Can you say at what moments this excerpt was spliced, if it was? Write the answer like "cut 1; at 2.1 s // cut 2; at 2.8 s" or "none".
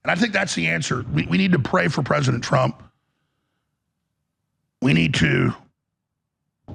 none